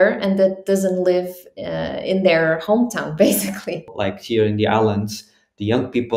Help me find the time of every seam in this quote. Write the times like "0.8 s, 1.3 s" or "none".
3.9 s